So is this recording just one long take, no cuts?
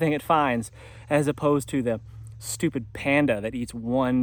yes; 0 cuts

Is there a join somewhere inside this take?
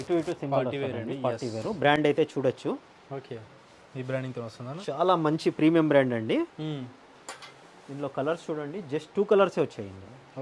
no; 0 cuts

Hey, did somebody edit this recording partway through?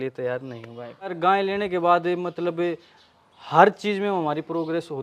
yes; 1 cut; at 1.1 s

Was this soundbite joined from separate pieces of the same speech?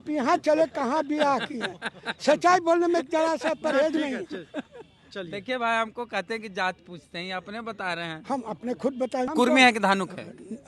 yes; 1 cut; at 9.3 s

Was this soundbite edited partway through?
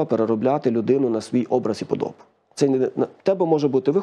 no; 0 cuts

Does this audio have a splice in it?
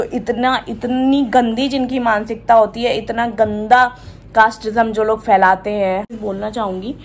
yes; 1 cut; at 6.1 s

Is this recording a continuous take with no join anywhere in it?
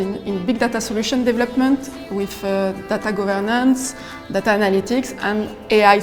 yes; 0 cuts

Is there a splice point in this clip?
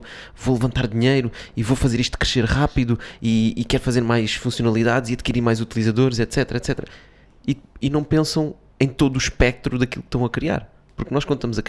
no; 0 cuts

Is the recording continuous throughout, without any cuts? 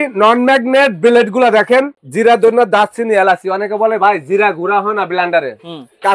no; 1 cut; at 2.0 s

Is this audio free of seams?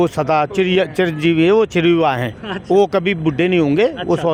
yes; 0 cuts

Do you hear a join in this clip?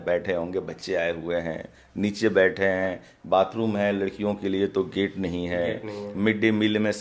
no; 0 cuts

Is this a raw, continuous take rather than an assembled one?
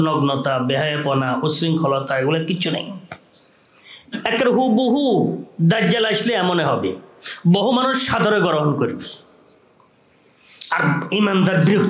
yes; 0 cuts

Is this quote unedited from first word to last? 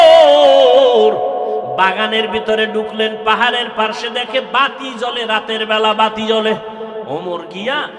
yes; 0 cuts

